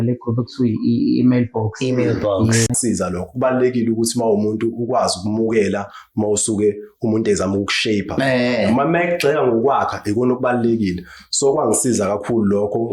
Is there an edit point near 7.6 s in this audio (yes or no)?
no